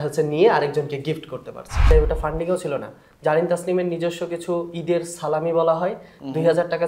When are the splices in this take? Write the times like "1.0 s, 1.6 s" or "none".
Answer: 1.9 s

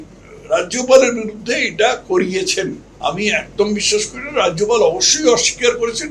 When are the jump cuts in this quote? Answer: 2.9 s

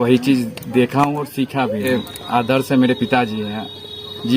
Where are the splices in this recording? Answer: 1.9 s

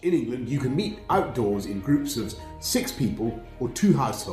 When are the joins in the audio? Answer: none

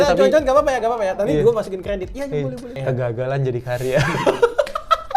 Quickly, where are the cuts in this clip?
2.8 s

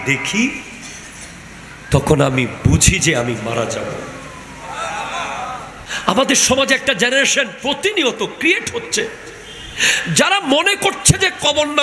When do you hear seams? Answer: 5.8 s

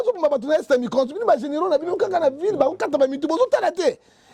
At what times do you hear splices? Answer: none

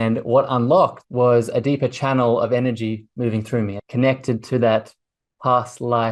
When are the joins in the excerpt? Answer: 1.0 s, 3.8 s

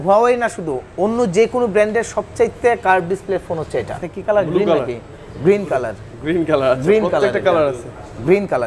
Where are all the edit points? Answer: 3.9 s

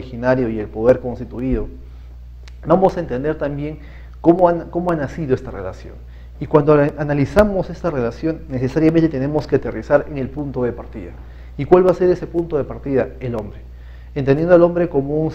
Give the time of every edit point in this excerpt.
3.0 s

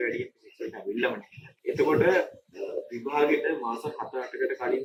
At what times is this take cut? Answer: none

